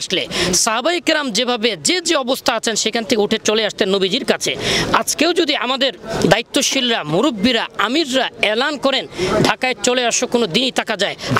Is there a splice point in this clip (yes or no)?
no